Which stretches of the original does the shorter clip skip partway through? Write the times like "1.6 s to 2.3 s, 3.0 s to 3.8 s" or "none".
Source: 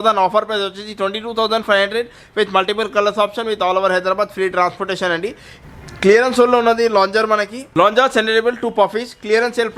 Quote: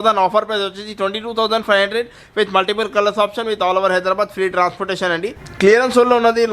5.4 s to 5.8 s